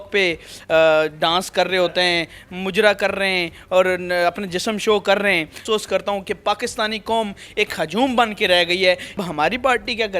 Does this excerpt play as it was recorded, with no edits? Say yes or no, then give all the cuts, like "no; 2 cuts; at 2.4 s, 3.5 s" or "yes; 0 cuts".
no; 2 cuts; at 5.6 s, 9.2 s